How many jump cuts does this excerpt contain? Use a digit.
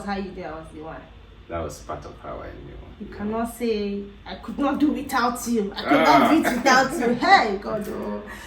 0